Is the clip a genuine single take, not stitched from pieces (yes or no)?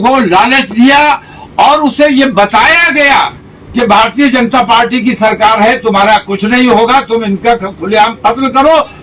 yes